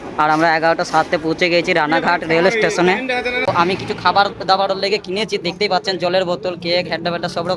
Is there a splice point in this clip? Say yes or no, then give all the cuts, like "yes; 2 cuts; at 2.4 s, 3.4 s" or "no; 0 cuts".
yes; 1 cut; at 3.5 s